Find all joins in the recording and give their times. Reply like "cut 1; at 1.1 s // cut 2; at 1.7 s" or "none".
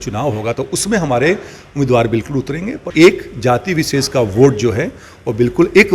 cut 1; at 2.8 s